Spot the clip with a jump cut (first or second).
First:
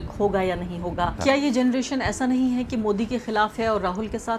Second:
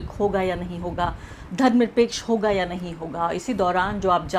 first